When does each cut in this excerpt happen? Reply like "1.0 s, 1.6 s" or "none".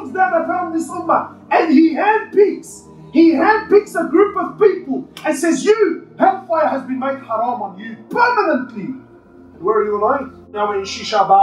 10.5 s